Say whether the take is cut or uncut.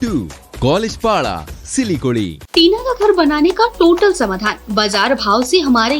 cut